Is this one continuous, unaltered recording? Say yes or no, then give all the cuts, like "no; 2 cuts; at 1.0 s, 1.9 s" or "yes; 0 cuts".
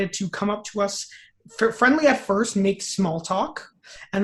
yes; 0 cuts